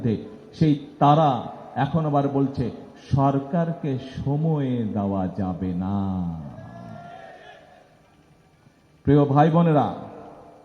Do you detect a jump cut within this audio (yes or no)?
no